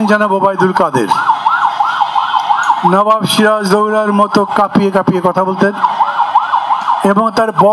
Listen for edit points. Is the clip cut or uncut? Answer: uncut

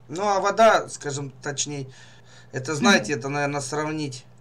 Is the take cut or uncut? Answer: uncut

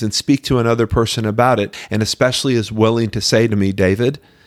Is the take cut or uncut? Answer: cut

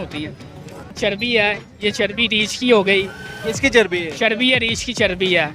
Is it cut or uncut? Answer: cut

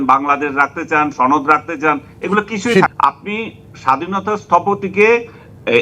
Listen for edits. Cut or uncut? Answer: cut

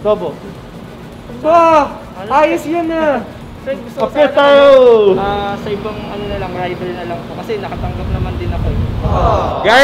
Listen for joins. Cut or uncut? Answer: uncut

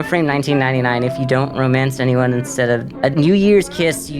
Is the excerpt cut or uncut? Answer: cut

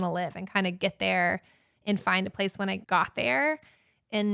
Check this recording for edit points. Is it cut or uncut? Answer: cut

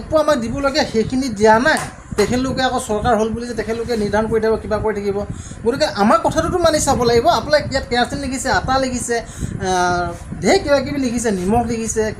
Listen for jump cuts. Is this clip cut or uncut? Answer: uncut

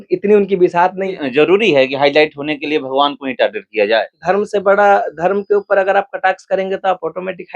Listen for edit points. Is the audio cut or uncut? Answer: cut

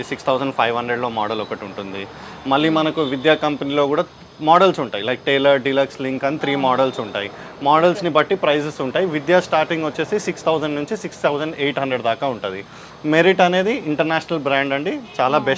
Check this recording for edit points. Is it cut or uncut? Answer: uncut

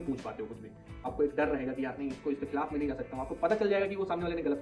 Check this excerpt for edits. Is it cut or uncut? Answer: cut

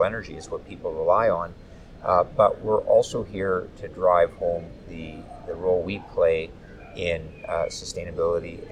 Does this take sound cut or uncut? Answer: uncut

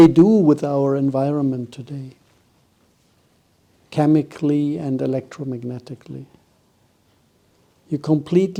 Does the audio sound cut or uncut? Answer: uncut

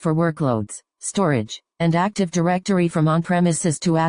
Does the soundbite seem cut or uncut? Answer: uncut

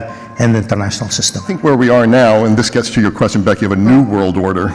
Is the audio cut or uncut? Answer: cut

